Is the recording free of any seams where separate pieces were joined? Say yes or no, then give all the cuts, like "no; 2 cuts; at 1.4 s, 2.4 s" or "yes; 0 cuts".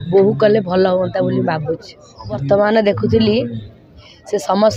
no; 1 cut; at 2.4 s